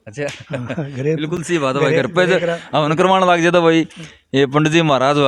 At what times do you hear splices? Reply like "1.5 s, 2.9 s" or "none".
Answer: none